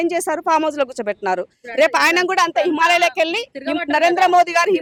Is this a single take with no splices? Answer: yes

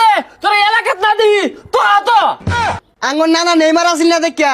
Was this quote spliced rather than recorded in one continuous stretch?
yes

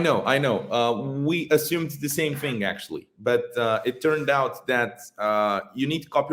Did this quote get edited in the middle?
no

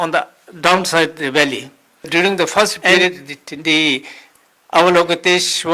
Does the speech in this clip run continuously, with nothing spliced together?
no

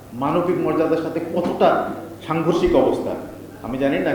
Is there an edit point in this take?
no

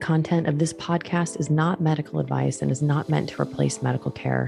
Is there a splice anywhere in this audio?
no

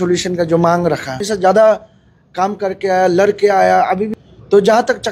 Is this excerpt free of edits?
no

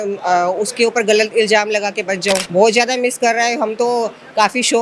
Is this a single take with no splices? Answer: no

